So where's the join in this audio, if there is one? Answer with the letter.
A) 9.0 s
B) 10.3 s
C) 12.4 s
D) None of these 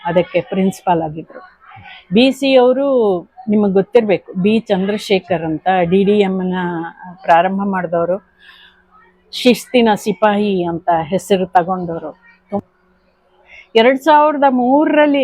C